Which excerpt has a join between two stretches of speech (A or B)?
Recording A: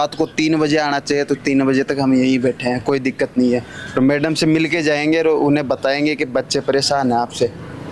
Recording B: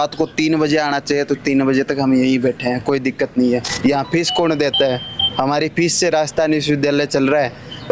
B